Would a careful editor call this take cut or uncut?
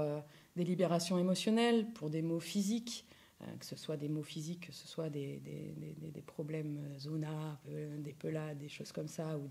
uncut